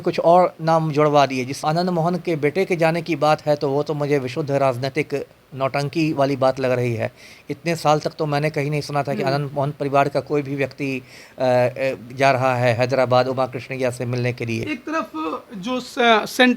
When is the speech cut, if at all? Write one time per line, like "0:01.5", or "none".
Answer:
0:01.6
0:14.6